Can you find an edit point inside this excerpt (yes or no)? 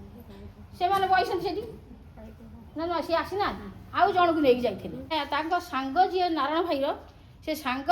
yes